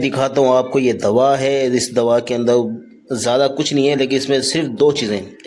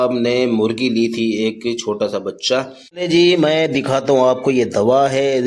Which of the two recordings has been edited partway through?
second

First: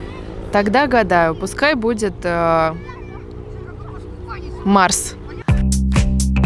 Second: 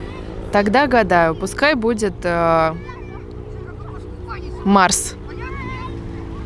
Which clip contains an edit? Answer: first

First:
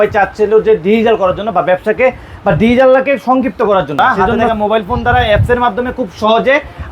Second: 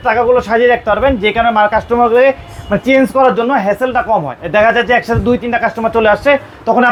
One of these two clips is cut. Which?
first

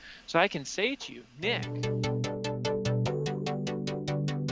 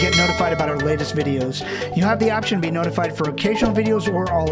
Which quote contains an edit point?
first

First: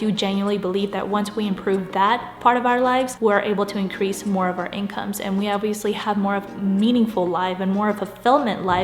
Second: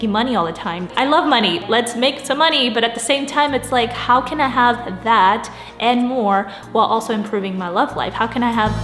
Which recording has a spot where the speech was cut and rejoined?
second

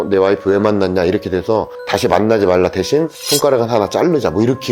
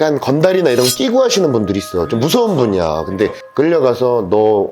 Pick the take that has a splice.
second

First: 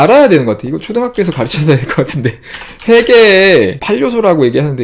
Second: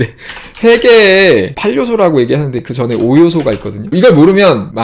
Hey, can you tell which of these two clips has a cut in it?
second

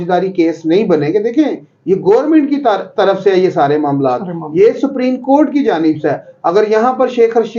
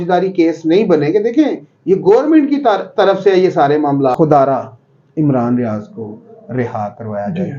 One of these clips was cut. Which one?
second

